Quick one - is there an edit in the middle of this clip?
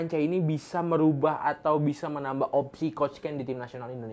no; 0 cuts

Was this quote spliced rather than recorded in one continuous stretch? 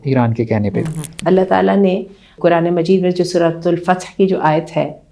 yes; 2 cuts; at 1.0 s, 2.3 s

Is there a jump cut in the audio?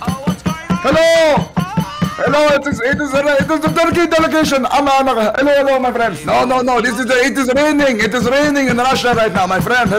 no; 0 cuts

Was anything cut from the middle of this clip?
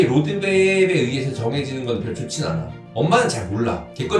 no; 0 cuts

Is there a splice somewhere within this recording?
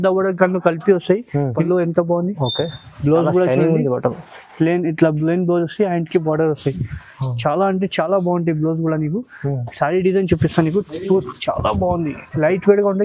yes; 1 cut; at 1.6 s

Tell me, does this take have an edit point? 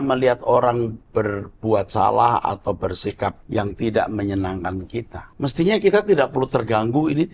yes; 3 cuts; at 1.0 s, 3.4 s, 5.2 s

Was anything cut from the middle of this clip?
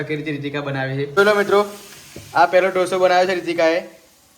yes; 1 cut; at 1.1 s

